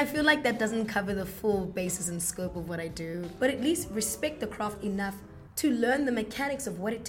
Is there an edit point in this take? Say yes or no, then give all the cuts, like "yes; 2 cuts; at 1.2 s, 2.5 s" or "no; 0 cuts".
yes; 1 cut; at 3.3 s